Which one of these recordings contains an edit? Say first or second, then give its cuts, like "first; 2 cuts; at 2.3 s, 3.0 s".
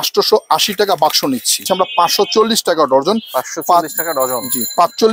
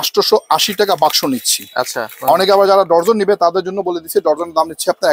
first; 1 cut; at 1.6 s